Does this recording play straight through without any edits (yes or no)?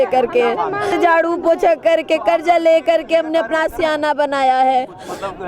no